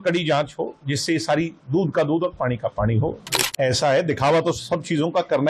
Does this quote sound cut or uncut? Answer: cut